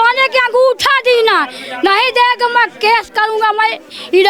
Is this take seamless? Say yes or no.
yes